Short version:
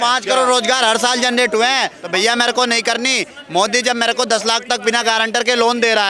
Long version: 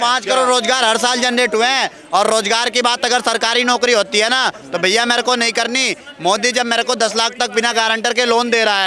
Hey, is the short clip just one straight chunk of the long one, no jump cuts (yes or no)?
no